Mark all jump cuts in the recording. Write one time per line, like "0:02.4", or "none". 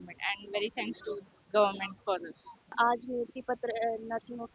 0:02.7